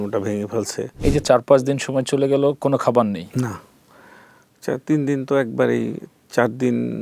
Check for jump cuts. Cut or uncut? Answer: cut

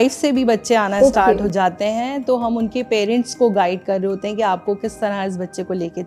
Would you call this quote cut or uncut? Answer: uncut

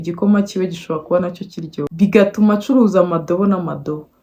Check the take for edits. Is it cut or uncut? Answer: uncut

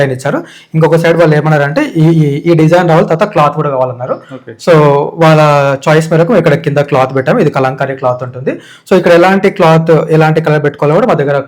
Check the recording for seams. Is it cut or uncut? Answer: uncut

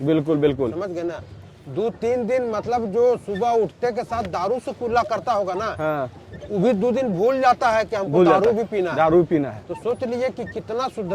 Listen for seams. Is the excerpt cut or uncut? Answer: uncut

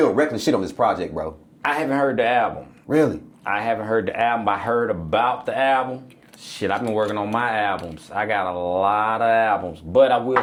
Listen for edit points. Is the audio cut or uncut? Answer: uncut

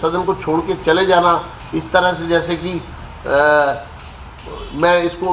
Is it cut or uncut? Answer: uncut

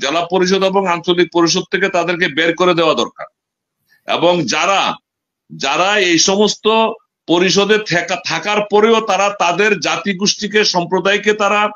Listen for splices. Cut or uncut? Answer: uncut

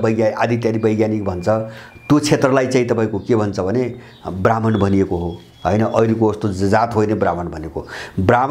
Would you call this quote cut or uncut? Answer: uncut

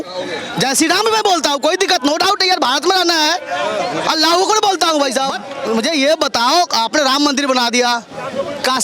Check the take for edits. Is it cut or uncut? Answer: cut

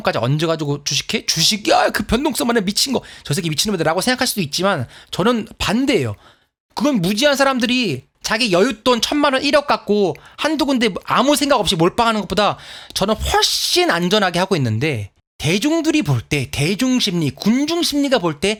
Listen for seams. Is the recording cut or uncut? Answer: uncut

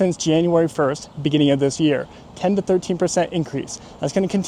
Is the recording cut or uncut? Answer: uncut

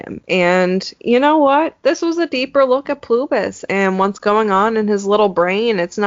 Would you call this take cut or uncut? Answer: uncut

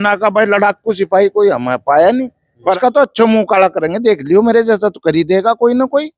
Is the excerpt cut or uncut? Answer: cut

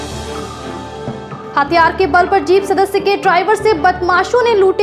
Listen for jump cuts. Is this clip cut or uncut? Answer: cut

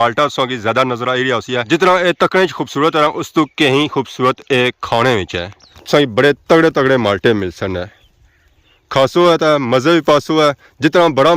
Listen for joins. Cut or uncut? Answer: cut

